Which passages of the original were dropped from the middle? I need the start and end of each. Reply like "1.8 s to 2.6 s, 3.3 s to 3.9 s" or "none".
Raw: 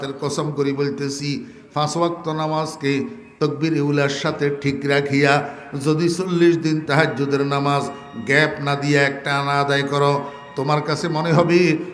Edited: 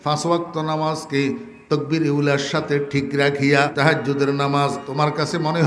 5.4 s to 6.8 s, 8.0 s to 10.5 s